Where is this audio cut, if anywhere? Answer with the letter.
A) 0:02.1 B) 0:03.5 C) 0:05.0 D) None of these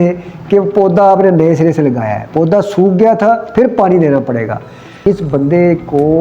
C